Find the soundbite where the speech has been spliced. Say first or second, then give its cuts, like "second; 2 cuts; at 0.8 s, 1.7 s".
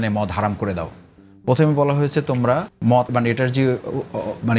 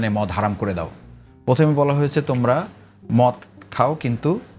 first; 1 cut; at 3.1 s